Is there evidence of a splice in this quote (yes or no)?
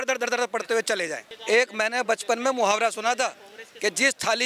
yes